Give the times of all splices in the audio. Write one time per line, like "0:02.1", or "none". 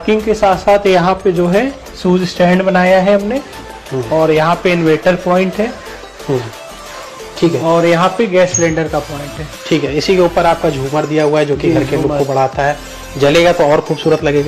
none